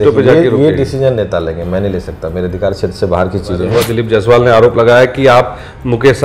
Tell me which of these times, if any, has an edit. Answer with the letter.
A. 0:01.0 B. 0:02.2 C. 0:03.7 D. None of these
C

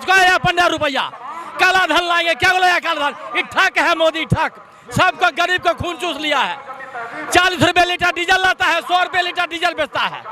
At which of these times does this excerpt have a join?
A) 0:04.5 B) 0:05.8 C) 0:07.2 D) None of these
D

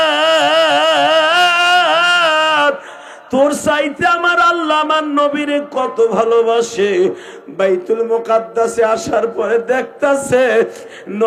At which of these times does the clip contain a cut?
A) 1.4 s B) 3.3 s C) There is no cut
C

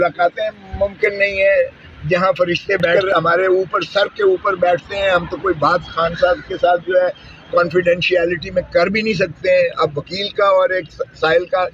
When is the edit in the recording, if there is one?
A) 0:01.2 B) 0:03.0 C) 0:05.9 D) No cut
B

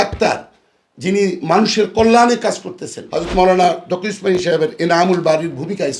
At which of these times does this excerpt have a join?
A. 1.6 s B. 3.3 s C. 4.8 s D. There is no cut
B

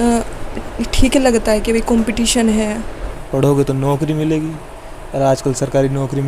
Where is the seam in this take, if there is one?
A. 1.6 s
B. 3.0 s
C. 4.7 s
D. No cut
B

